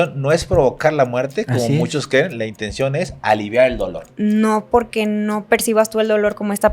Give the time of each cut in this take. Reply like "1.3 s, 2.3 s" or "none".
4.1 s